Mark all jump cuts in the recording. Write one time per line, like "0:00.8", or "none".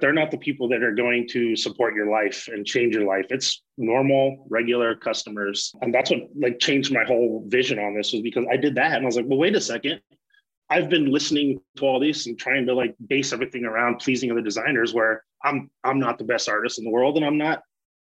0:05.7